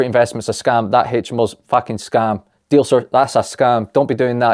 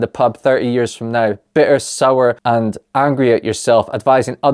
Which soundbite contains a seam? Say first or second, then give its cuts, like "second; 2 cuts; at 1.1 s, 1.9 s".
second; 1 cut; at 2.4 s